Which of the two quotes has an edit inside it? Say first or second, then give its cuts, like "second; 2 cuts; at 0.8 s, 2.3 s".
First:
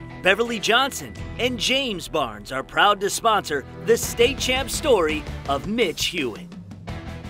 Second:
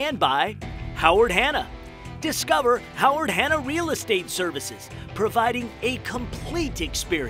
first; 1 cut; at 6.4 s